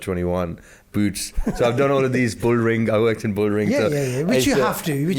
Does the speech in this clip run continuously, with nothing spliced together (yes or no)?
yes